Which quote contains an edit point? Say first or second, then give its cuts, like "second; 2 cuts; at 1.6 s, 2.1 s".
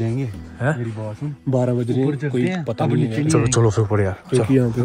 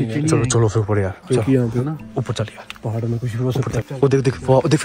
second; 1 cut; at 3.9 s